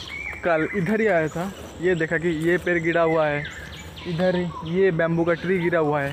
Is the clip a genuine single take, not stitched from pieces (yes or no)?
yes